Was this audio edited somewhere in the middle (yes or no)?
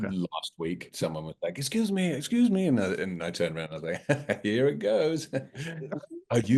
yes